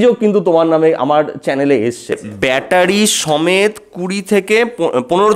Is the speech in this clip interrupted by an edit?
yes; 1 cut; at 2.1 s

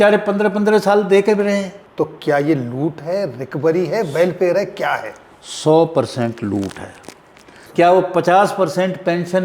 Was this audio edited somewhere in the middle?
yes; 2 cuts; at 1.8 s, 7.6 s

